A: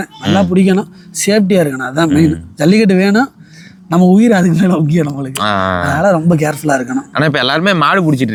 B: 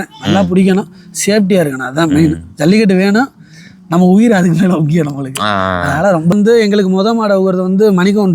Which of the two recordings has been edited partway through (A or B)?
B